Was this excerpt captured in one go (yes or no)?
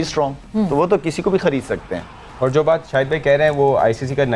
yes